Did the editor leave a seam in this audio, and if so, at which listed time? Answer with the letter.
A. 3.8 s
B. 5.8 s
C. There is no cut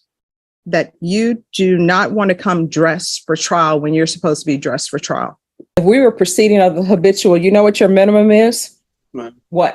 B